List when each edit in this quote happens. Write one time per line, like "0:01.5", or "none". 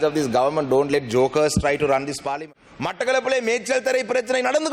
0:02.3